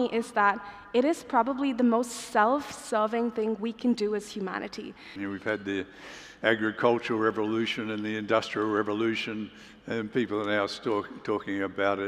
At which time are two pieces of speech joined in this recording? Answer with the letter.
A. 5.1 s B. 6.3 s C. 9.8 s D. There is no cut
A